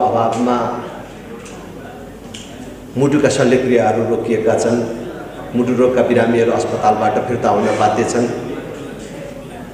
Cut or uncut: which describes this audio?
uncut